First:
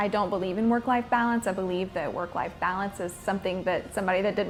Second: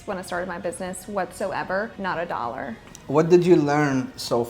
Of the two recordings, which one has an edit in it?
second; 2 cuts; at 1.9 s, 2.9 s

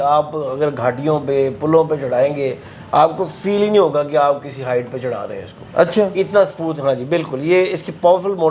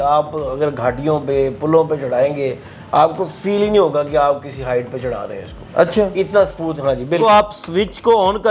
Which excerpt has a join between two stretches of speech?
second; 1 cut; at 7.2 s

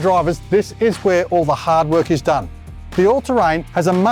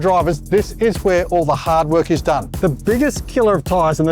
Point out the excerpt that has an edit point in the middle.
second; 1 cut; at 2.5 s

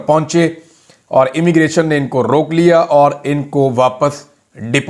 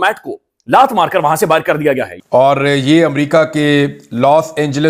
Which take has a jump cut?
second; 1 cut; at 2.1 s

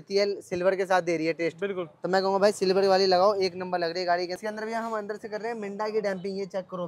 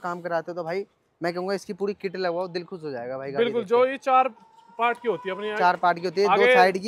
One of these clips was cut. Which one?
first; 1 cut; at 4.4 s

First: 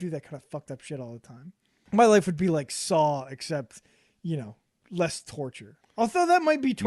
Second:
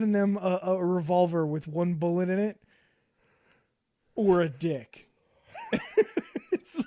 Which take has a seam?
first; 1 cut; at 1.8 s

